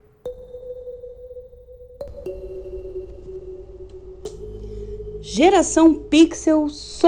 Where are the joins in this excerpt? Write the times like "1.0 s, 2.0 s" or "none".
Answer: 5.3 s